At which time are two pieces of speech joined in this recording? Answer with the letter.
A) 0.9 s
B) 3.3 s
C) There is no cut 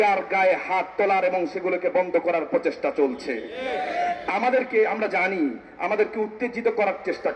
C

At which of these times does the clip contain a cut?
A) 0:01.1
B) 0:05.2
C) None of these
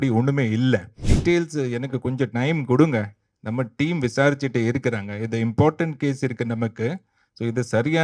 A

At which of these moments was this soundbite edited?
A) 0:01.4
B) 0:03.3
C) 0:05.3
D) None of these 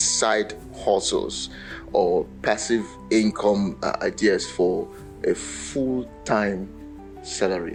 D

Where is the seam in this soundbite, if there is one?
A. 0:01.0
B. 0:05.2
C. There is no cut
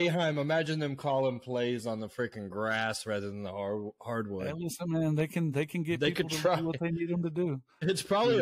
C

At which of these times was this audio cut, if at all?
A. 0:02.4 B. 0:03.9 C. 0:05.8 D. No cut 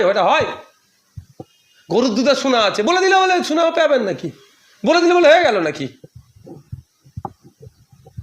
D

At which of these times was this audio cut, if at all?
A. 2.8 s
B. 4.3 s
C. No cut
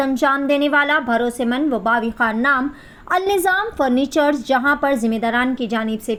C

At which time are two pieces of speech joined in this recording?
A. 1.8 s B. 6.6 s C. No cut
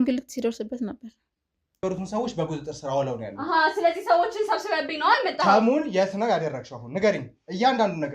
A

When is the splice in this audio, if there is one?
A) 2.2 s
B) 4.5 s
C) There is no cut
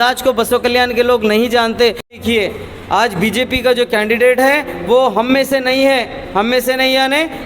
A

